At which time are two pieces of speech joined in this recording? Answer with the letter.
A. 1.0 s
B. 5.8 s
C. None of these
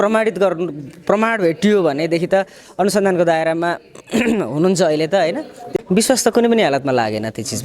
B